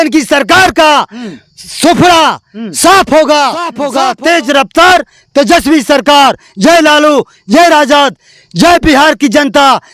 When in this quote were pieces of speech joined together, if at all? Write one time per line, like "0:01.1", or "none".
0:03.8